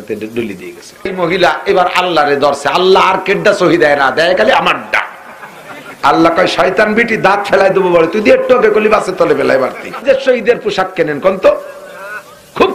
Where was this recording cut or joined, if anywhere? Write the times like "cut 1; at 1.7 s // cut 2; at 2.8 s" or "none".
cut 1; at 1.1 s // cut 2; at 10.0 s